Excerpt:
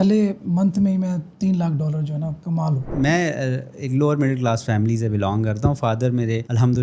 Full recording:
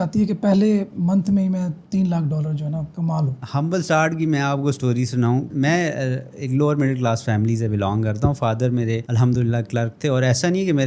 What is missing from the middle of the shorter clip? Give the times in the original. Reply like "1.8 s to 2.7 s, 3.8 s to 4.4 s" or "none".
3.4 s to 5.5 s